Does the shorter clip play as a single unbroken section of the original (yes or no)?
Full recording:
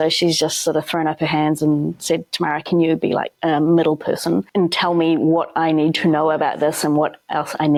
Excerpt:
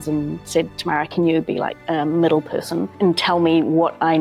yes